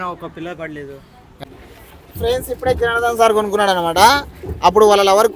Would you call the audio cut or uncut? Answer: cut